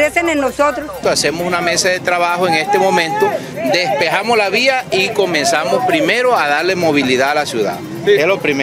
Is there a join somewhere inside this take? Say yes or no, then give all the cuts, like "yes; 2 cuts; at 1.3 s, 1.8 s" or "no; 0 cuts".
yes; 1 cut; at 1.0 s